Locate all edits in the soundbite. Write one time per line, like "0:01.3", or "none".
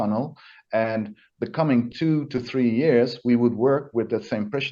none